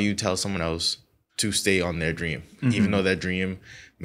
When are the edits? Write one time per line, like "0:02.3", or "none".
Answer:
none